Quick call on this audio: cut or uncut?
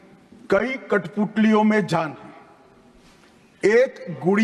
uncut